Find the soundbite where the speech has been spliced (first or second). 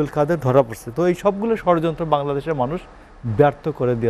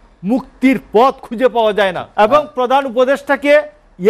second